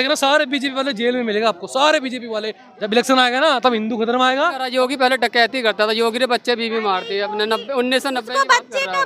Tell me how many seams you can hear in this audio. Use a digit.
2